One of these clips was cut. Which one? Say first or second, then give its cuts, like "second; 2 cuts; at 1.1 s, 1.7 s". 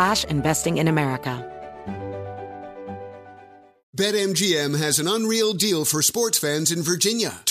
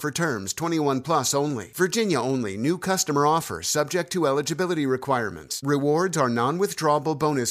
first; 1 cut; at 1.4 s